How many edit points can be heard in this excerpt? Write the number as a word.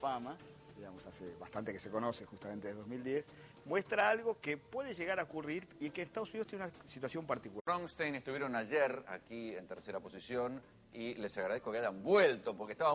zero